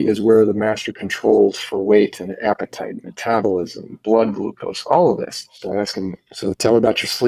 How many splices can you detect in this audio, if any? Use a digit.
1